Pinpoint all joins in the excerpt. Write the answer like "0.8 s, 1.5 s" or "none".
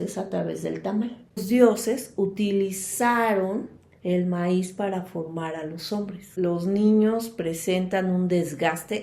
1.4 s, 6.3 s